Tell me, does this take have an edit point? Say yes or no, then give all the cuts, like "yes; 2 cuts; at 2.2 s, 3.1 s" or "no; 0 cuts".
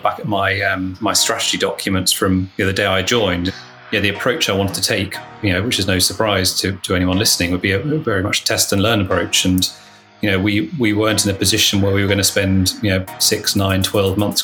yes; 2 cuts; at 0.9 s, 3.5 s